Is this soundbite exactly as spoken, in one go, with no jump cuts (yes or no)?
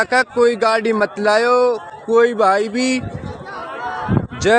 yes